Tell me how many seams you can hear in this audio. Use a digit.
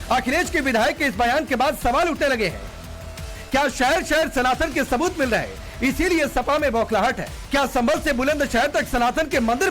1